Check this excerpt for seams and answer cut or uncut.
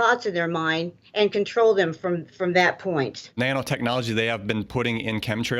cut